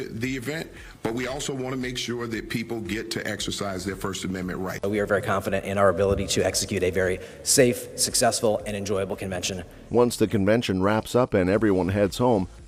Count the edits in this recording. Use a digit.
0